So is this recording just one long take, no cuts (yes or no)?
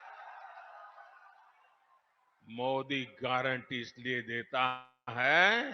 yes